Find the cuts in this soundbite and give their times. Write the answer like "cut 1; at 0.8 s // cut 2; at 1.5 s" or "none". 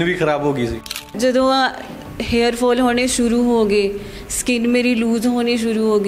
cut 1; at 1.0 s